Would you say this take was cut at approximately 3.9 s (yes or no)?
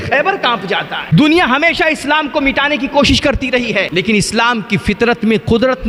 yes